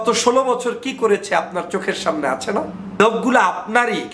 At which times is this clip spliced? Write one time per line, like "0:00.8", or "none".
0:03.0